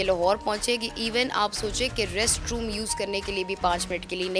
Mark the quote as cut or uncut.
uncut